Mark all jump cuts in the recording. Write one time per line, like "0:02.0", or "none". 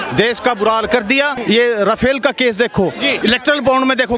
0:01.3
0:03.2